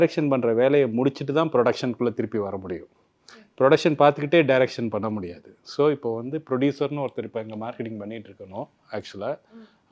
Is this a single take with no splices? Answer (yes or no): yes